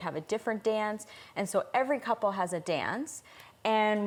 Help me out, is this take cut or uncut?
uncut